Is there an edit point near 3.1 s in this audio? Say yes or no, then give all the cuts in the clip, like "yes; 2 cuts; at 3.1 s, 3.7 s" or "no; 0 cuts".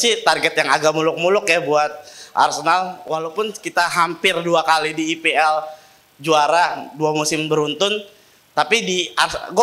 no; 0 cuts